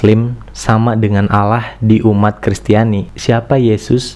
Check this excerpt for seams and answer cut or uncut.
cut